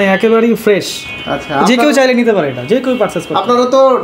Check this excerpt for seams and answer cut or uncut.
uncut